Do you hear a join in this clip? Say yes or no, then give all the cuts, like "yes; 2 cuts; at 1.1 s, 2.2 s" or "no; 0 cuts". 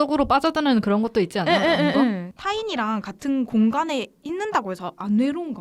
yes; 1 cut; at 2.3 s